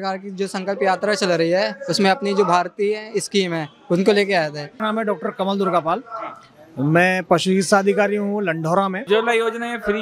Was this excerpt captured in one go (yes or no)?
no